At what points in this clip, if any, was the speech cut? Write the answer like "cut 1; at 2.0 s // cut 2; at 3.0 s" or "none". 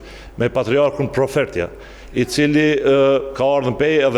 none